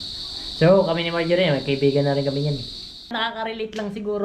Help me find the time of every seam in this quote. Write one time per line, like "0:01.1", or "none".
0:03.1